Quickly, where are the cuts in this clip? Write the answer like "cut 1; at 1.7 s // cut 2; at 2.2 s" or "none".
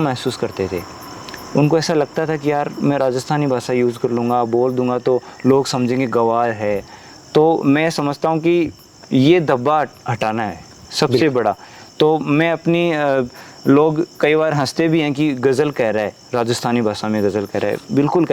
none